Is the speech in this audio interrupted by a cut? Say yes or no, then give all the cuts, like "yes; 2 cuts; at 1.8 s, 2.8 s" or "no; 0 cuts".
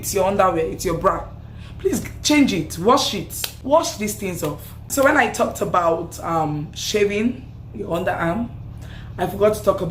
no; 0 cuts